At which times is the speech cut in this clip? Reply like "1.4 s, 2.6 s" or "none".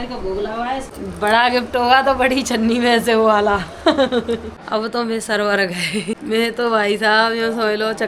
0.9 s, 4.5 s, 6.2 s